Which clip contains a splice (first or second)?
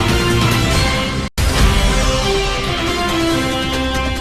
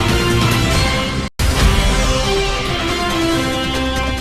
first